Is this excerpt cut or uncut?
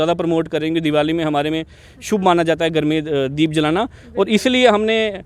uncut